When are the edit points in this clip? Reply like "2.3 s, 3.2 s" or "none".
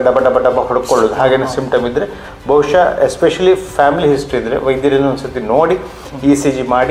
none